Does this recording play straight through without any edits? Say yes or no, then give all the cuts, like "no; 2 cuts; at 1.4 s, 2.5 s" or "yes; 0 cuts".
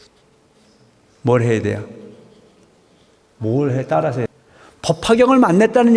no; 1 cut; at 4.3 s